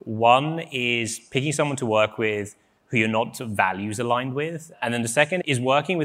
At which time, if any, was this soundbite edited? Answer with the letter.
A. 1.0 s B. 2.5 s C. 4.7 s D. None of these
C